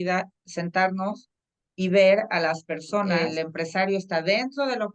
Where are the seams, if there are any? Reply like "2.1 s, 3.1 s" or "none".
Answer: 3.1 s